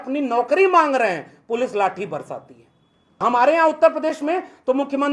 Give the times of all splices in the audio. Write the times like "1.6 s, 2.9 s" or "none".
3.2 s